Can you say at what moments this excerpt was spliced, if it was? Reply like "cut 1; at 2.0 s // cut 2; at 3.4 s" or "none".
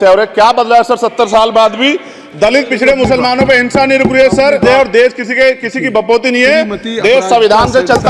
cut 1; at 4.6 s